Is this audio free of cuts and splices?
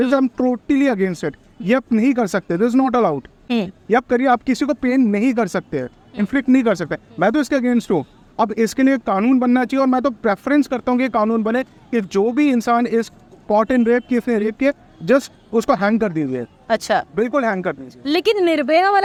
yes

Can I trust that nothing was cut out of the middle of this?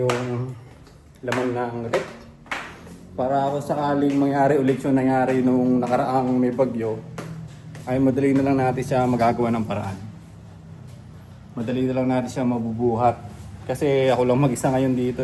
yes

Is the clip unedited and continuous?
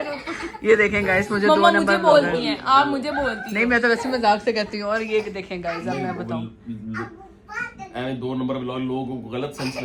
yes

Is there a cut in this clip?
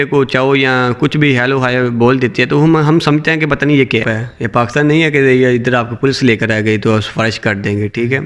yes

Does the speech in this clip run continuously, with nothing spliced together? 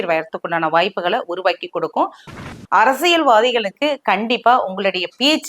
no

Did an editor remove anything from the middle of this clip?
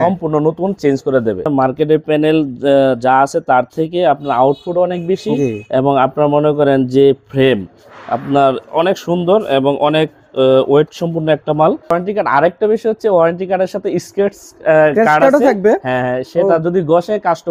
yes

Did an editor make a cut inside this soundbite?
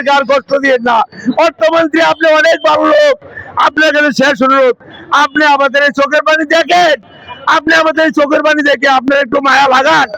no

